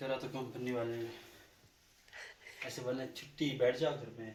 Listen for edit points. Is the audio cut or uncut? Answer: uncut